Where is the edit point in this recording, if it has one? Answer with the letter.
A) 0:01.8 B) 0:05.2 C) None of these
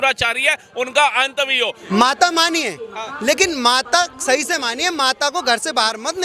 A